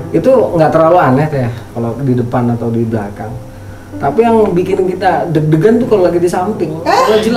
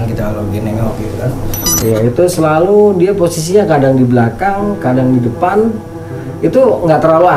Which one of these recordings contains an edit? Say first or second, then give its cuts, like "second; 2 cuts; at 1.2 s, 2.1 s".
second; 1 cut; at 1.8 s